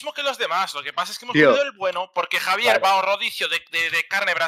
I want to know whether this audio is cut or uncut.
uncut